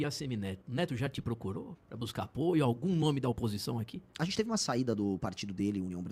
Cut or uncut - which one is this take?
uncut